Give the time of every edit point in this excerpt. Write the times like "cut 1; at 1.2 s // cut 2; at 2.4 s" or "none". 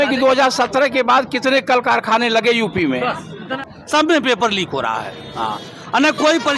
cut 1; at 3.5 s